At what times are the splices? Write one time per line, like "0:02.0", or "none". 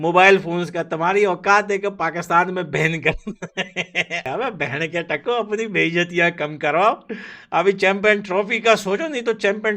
0:04.3